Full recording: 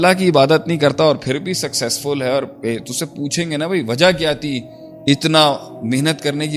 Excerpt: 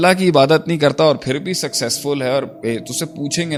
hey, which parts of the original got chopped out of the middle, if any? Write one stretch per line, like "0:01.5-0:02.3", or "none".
none